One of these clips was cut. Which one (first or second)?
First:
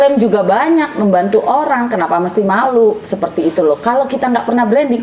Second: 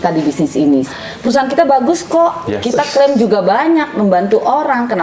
second